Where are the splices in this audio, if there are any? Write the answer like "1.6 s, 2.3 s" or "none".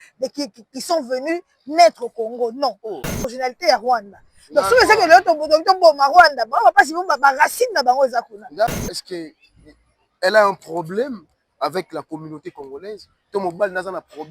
3.2 s, 8.8 s

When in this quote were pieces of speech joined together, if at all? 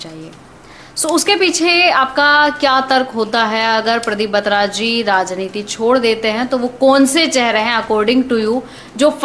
none

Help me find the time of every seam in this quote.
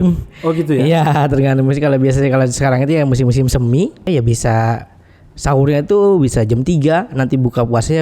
4.1 s

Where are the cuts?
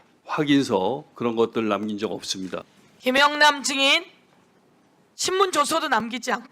2.7 s

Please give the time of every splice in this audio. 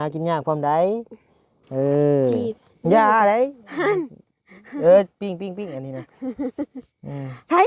2.4 s

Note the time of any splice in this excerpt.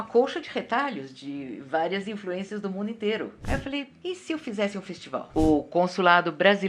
3.4 s, 5.3 s

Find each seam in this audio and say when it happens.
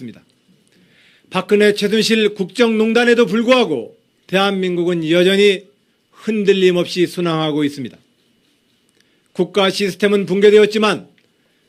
none

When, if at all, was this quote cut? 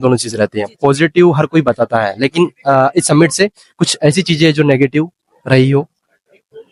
none

